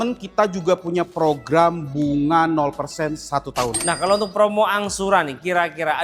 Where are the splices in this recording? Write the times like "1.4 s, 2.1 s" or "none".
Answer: 3.9 s